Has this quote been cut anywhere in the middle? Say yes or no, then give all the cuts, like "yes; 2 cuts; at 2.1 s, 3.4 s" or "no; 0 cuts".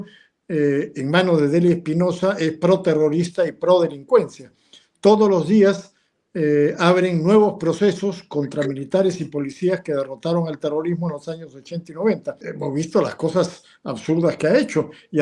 yes; 1 cut; at 12.4 s